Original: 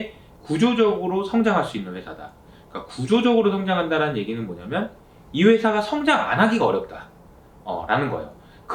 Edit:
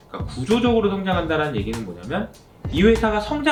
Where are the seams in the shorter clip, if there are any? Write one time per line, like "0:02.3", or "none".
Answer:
none

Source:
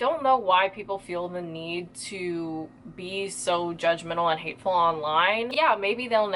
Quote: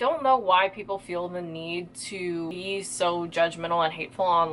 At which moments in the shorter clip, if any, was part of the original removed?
0:02.5

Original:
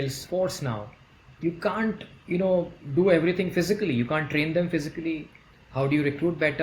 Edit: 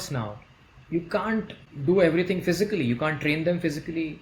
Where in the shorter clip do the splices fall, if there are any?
0:01.7

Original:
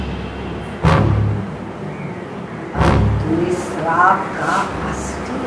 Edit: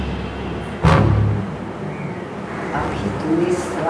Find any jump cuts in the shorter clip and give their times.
none

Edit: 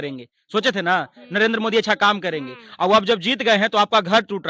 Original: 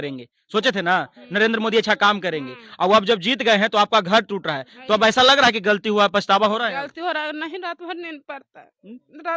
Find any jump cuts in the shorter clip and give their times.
none

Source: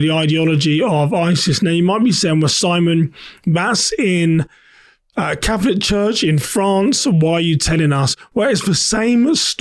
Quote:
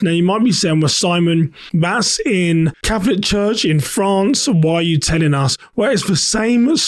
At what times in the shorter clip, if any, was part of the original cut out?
0:01.6
0:02.8

